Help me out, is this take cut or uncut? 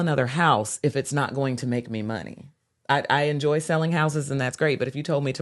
uncut